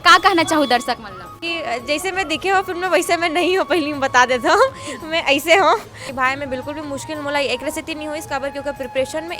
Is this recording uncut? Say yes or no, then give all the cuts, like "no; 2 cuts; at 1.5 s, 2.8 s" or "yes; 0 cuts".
no; 2 cuts; at 1.4 s, 6.1 s